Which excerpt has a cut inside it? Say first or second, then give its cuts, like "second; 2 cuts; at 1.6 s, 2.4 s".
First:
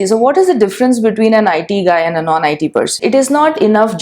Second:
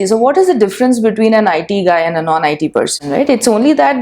first; 1 cut; at 3.0 s